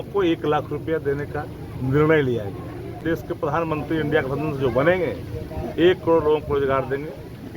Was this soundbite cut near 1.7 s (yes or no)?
no